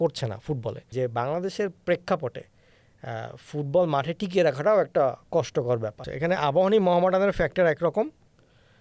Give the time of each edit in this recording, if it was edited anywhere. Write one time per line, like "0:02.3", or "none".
0:00.9
0:06.0